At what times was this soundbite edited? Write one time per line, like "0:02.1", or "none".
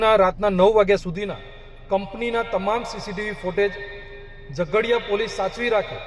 none